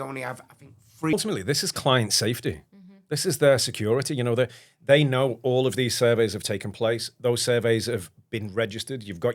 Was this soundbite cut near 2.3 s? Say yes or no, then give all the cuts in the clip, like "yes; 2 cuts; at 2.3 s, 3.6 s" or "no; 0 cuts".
no; 1 cut; at 1.1 s